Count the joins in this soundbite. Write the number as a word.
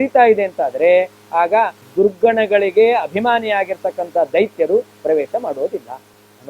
one